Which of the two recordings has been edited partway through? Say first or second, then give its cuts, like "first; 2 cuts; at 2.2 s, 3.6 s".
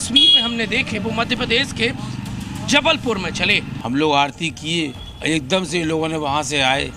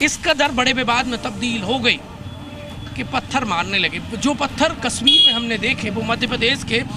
first; 2 cuts; at 3.7 s, 5.1 s